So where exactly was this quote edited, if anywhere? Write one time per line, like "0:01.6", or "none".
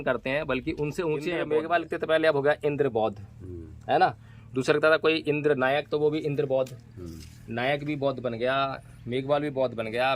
0:01.4